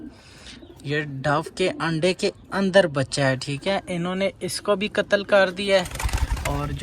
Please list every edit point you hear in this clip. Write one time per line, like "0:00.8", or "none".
none